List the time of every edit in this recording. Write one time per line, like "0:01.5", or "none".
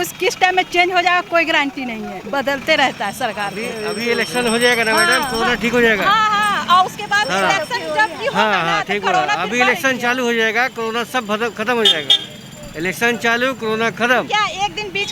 none